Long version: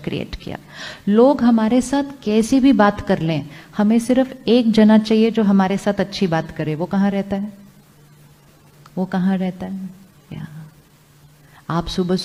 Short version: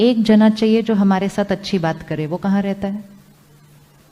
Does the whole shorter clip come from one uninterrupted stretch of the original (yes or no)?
yes